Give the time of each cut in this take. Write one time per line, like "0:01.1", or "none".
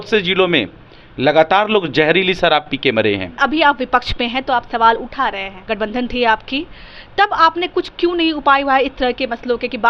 0:03.4
0:05.5